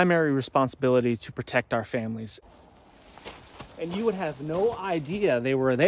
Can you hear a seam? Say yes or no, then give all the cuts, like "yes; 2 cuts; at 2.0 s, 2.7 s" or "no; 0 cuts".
yes; 1 cut; at 2.3 s